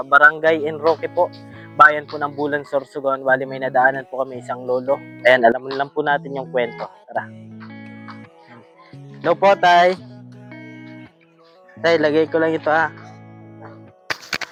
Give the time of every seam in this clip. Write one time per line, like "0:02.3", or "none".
none

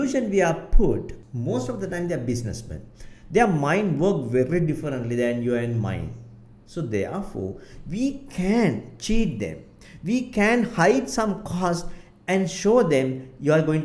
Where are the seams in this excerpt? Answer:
0:01.2

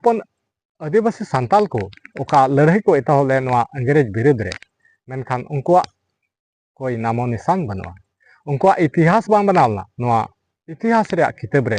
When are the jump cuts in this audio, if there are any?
0:09.9

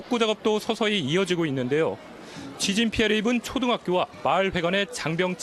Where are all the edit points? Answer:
0:04.4

